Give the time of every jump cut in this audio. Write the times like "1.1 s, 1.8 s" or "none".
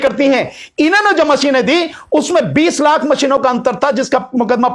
none

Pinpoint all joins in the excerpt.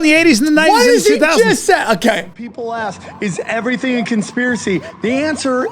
2.3 s

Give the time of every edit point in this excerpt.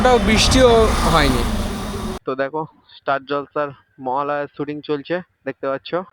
2.1 s

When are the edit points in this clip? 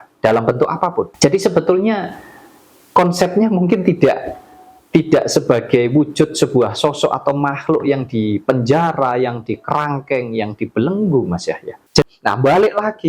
1.1 s, 12.0 s

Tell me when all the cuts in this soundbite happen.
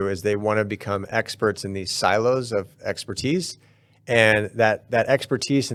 none

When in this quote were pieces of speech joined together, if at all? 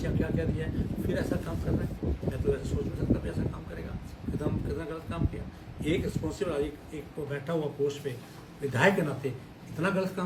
none

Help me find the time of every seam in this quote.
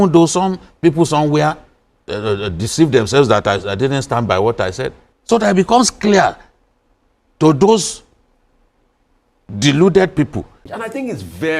5.0 s, 10.6 s

